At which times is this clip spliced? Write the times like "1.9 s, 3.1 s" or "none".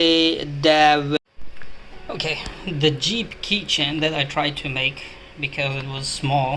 1.2 s